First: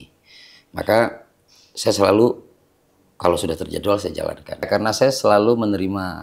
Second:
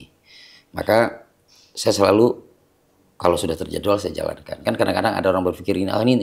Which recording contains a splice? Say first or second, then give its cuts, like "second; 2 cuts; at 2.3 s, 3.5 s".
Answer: first; 1 cut; at 4.7 s